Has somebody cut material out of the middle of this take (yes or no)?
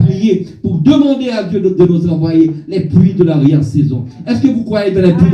no